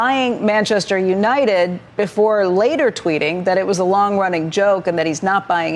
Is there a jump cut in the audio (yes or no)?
no